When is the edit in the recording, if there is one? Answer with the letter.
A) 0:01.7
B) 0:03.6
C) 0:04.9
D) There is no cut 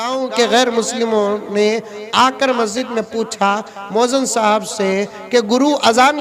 D